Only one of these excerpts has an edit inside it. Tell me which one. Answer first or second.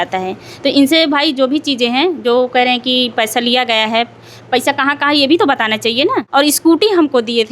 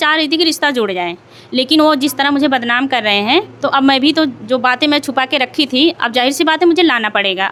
first